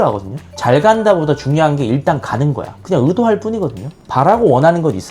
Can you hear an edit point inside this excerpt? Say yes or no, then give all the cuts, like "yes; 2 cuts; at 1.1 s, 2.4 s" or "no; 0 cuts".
yes; 1 cut; at 2.7 s